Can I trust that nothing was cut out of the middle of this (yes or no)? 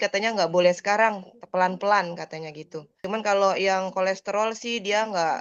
no